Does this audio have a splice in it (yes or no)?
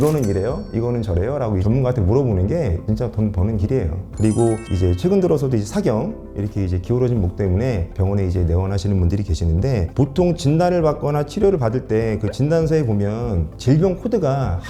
no